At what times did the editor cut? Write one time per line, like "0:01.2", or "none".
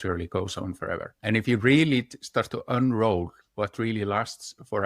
0:01.1